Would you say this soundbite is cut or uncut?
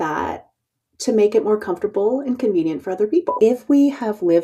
cut